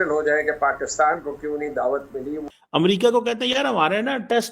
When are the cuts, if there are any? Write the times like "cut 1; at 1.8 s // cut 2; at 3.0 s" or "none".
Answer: cut 1; at 2.5 s